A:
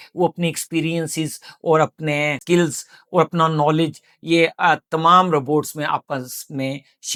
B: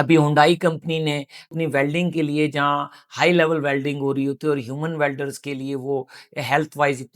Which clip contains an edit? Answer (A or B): B